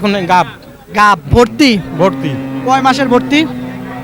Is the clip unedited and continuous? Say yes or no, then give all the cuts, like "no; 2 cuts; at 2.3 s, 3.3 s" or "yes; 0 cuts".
yes; 0 cuts